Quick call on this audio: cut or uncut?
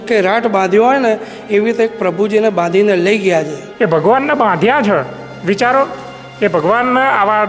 cut